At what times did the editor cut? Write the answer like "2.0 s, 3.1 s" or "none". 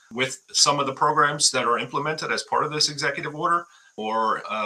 none